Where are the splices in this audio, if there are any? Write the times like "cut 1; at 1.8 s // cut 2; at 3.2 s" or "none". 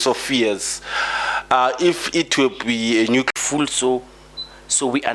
cut 1; at 3.3 s